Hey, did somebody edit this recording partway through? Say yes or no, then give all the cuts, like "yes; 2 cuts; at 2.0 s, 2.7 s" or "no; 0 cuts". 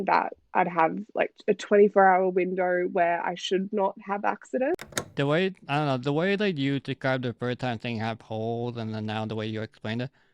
yes; 1 cut; at 5.0 s